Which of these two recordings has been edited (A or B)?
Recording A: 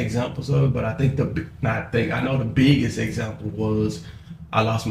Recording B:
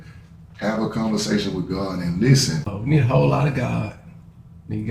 B